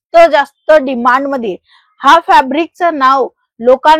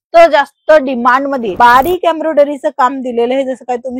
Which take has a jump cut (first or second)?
second